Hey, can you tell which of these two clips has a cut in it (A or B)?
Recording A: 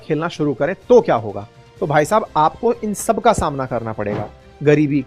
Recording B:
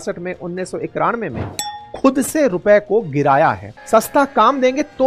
B